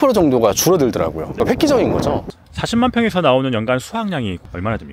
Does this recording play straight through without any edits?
no; 2 cuts; at 1.4 s, 2.2 s

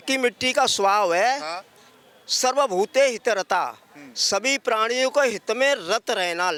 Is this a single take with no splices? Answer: yes; 0 cuts

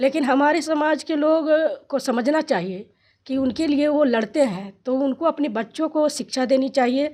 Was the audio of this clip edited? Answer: no; 0 cuts

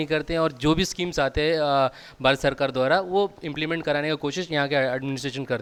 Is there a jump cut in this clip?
no; 0 cuts

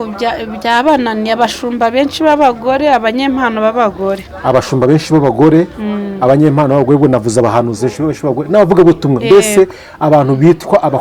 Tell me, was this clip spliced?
no; 0 cuts

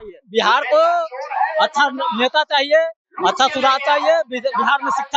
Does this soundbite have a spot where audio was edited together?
no; 0 cuts

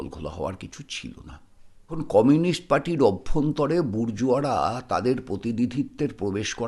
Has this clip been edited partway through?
yes; 1 cut; at 2.0 s

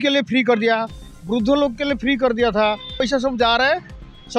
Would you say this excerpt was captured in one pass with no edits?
no; 1 cut; at 3.0 s

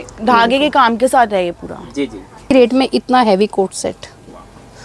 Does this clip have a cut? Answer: yes; 1 cut; at 2.5 s

